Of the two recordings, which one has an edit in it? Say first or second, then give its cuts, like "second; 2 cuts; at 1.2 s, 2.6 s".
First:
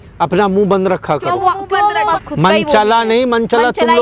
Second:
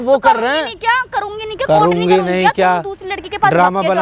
first; 1 cut; at 2.1 s